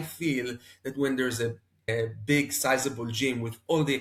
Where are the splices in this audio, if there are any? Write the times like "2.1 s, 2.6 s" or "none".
none